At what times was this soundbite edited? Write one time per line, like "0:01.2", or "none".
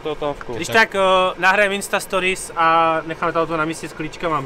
none

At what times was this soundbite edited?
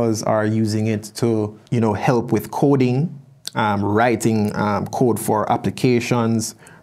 0:01.6

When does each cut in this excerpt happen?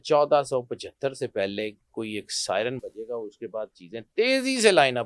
none

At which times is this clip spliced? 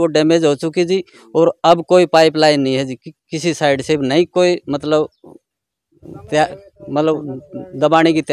none

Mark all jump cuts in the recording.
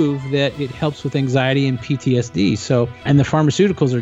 0:03.0

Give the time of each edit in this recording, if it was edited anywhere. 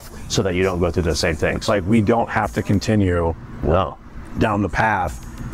0:01.6

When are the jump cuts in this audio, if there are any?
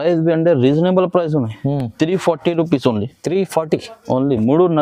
none

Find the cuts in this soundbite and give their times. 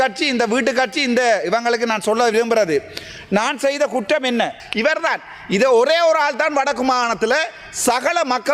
0:04.6

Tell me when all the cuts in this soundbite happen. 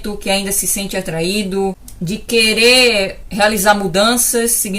0:01.9

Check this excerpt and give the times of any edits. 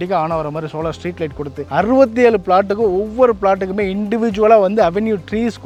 none

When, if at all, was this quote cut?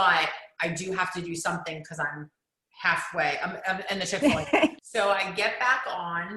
0:04.8

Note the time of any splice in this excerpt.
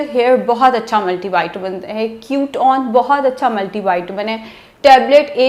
none

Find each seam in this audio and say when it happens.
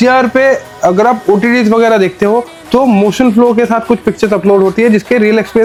none

